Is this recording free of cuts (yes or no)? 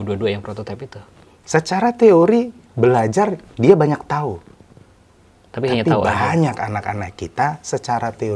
no